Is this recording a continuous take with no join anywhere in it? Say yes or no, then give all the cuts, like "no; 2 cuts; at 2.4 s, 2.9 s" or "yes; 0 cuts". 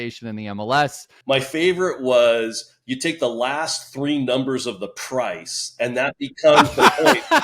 no; 1 cut; at 1.0 s